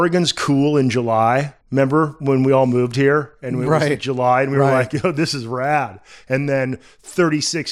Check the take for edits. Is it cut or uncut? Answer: cut